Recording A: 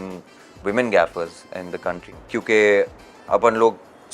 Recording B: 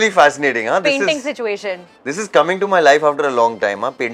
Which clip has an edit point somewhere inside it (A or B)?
A